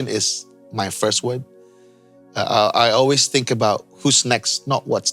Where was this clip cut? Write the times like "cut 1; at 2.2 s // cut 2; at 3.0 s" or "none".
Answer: none